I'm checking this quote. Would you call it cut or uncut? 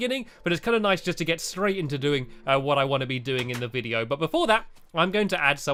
uncut